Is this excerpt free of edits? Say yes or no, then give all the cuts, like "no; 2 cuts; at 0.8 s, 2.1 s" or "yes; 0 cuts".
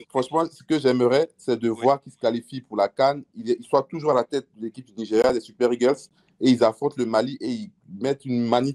yes; 0 cuts